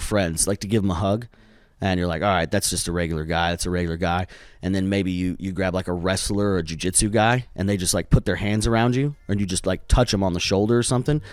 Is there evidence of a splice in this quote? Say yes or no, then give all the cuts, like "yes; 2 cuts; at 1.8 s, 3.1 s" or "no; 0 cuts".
no; 0 cuts